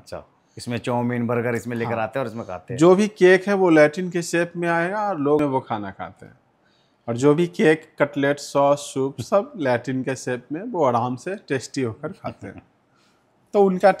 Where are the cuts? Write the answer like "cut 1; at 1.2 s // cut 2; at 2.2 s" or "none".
none